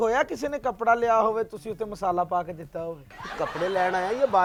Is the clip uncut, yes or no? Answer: yes